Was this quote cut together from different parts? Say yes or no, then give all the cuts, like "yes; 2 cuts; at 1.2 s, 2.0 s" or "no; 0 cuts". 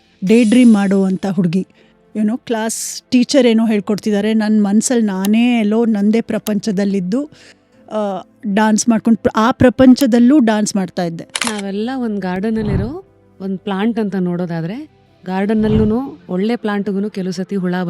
yes; 1 cut; at 11.6 s